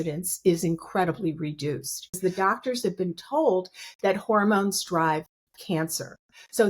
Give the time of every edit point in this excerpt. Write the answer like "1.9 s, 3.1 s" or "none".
2.3 s